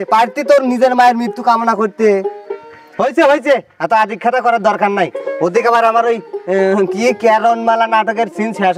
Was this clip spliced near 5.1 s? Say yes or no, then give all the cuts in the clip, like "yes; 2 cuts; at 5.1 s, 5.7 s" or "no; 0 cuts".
no; 0 cuts